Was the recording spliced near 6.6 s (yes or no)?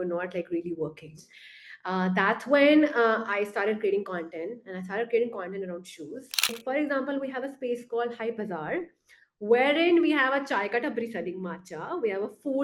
yes